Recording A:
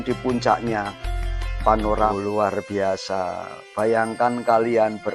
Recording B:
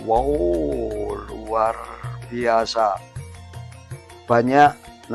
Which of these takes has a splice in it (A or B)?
A